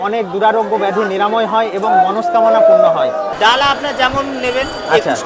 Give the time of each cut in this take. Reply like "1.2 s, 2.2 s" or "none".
3.3 s